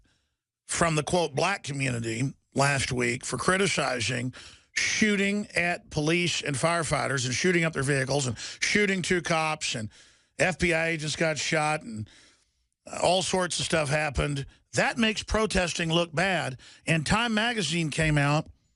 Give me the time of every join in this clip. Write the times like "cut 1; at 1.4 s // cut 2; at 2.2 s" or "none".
none